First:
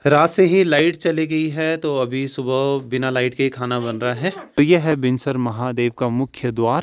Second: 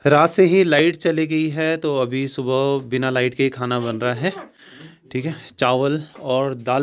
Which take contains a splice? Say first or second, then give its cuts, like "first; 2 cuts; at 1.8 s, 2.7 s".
first; 1 cut; at 4.5 s